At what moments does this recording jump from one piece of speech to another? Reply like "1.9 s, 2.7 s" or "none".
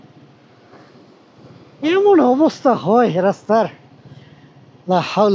none